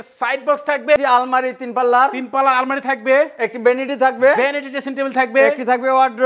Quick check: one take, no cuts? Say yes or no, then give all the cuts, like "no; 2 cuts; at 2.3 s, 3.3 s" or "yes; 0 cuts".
no; 1 cut; at 1.0 s